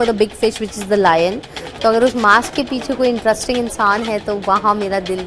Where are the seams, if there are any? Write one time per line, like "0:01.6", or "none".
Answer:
none